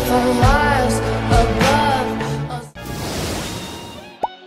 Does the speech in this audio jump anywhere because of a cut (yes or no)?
no